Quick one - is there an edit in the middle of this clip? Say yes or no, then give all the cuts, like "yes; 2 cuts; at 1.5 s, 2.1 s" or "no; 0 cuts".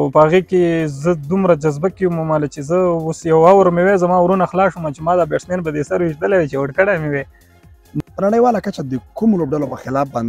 yes; 1 cut; at 8.0 s